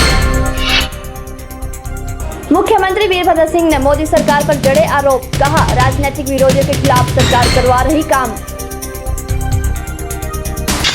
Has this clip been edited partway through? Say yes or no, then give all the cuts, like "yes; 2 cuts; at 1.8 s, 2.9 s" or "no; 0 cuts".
yes; 1 cut; at 1.4 s